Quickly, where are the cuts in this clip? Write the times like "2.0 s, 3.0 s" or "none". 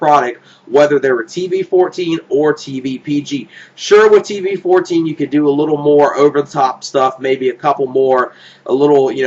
none